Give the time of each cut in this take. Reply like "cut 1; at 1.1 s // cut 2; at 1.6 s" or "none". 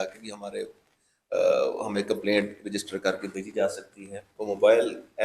cut 1; at 4.3 s